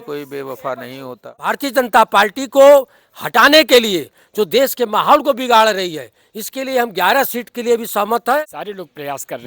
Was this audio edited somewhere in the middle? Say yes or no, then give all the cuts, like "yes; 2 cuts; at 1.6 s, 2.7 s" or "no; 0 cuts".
yes; 2 cuts; at 1.5 s, 8.4 s